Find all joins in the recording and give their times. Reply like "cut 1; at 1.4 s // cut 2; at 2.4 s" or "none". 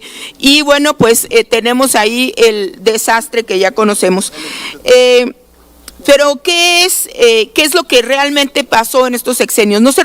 none